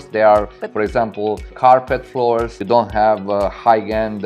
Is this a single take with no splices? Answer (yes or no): no